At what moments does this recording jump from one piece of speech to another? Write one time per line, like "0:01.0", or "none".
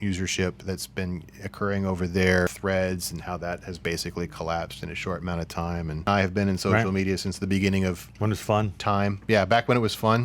0:02.5
0:06.1